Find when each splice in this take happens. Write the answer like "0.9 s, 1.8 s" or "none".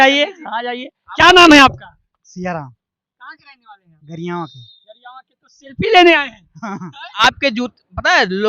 7.1 s